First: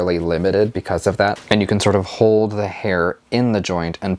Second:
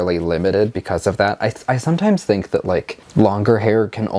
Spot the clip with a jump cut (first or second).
first